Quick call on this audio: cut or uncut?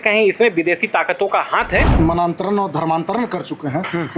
cut